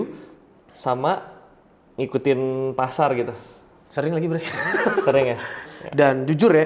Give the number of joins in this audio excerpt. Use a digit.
1